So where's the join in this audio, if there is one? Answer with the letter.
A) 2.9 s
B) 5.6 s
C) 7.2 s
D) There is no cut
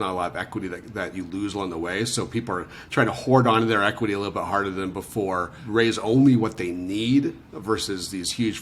B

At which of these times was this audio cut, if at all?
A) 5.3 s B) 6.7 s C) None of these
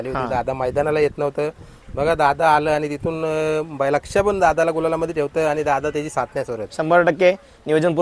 C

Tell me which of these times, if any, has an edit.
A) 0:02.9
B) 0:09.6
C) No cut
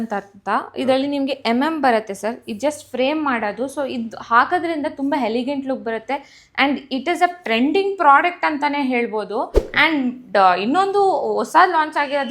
B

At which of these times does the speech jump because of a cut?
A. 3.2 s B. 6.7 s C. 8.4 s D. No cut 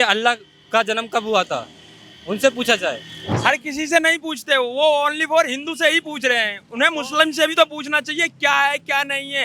A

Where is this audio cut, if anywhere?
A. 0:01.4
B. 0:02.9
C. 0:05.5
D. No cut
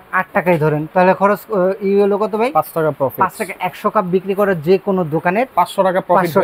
C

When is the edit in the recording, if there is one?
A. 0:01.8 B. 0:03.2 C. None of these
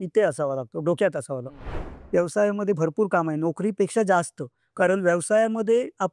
A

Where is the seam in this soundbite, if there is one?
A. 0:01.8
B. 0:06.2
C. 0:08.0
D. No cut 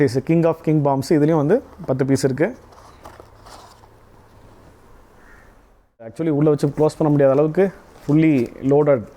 B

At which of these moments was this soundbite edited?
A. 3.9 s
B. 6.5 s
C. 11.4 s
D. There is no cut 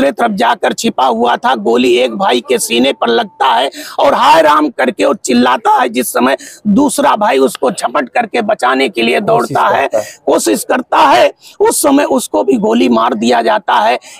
D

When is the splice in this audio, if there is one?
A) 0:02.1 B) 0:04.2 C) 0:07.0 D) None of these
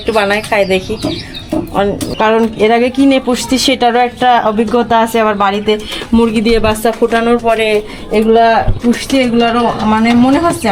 A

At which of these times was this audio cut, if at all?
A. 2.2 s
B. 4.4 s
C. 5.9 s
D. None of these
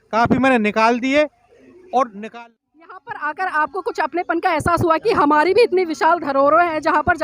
A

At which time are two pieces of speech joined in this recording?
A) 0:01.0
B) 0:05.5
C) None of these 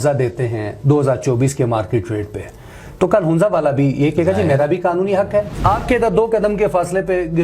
B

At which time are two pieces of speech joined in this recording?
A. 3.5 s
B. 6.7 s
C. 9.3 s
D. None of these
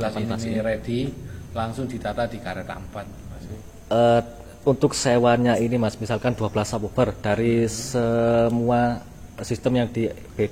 A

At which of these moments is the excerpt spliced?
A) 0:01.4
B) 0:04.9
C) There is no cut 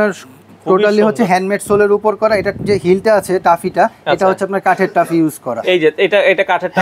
C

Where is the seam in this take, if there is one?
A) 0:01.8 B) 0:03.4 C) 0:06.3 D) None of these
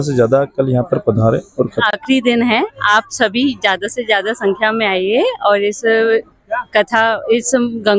A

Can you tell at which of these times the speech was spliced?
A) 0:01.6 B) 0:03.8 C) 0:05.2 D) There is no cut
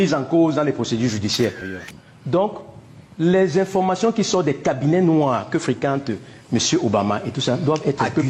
A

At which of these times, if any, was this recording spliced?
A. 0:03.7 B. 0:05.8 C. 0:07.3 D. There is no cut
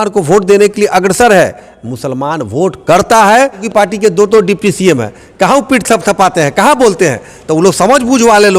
A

